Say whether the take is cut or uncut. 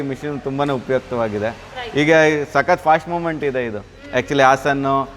uncut